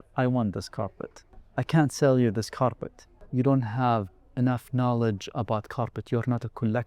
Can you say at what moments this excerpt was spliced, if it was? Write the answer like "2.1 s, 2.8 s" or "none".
1.4 s, 3.1 s